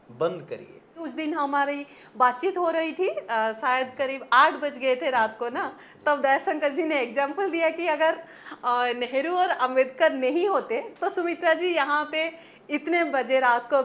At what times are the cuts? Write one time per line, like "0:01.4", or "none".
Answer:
0:01.0